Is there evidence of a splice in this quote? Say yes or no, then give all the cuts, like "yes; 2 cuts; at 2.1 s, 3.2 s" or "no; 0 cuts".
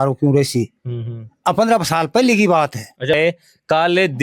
yes; 1 cut; at 3.2 s